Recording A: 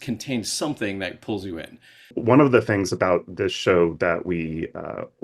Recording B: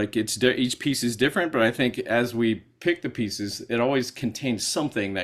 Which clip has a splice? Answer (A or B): A